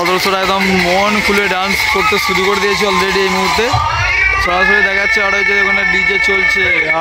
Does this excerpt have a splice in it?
no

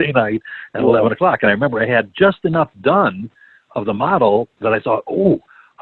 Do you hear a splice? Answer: no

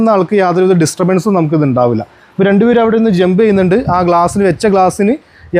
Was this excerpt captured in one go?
yes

